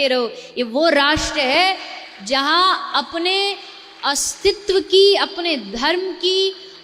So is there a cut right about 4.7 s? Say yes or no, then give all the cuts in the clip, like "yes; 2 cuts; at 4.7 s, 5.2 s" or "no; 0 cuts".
no; 0 cuts